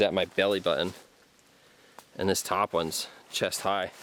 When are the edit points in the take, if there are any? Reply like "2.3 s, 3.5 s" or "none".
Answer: none